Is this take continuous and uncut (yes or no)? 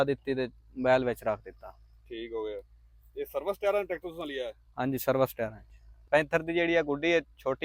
no